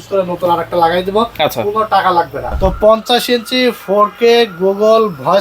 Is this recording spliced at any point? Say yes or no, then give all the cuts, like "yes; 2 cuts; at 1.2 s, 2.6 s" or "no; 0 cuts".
yes; 1 cut; at 2.5 s